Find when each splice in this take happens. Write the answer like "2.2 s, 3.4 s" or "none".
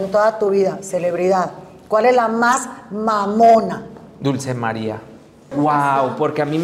5.6 s